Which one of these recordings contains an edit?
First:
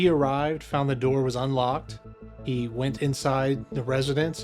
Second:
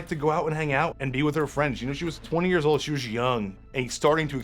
second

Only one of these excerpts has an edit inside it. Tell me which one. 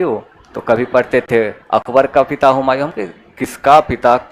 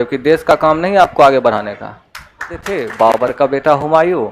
second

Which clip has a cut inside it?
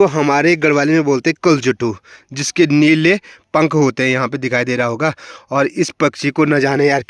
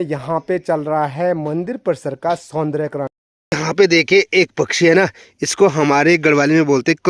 second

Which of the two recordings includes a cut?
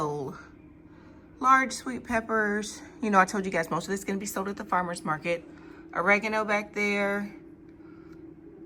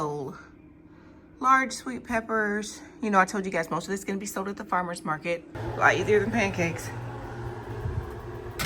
second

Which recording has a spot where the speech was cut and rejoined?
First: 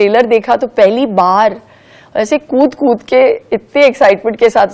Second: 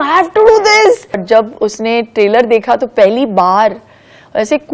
second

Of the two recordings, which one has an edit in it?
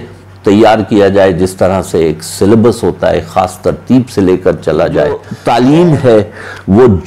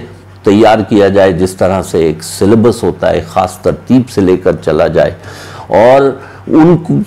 first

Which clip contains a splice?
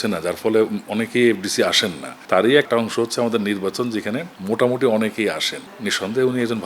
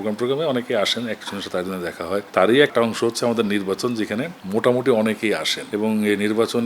first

